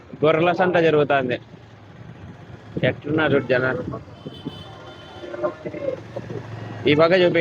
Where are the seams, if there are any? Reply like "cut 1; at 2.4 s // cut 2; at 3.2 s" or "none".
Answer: none